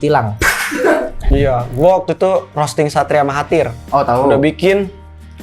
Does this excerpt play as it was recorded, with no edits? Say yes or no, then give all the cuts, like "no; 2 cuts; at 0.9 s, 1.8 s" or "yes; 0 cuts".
no; 1 cut; at 1.2 s